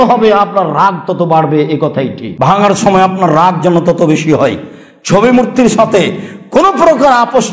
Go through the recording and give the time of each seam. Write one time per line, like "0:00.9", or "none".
0:02.2